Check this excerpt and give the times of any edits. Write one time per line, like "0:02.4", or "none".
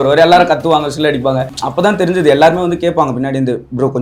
0:01.5